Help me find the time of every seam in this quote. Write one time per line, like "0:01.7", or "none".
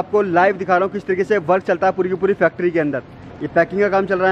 none